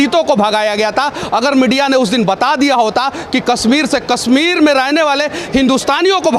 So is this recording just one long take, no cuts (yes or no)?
yes